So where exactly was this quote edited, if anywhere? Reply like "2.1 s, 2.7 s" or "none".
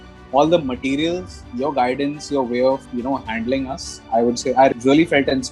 2.9 s, 4.7 s